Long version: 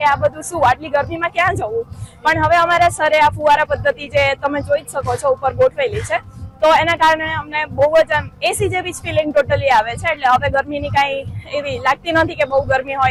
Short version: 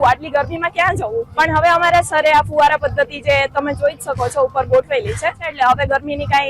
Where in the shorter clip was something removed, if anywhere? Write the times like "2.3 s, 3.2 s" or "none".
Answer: 1.3 s, 5.4 s